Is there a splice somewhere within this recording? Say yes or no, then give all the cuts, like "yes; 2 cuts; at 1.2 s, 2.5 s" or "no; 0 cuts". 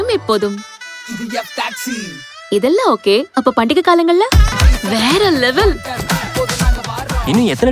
yes; 1 cut; at 4.6 s